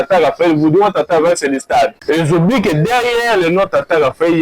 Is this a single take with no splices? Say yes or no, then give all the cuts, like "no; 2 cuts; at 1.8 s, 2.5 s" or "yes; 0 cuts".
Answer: no; 1 cut; at 2.0 s